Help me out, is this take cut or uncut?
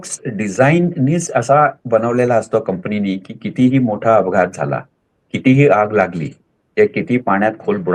uncut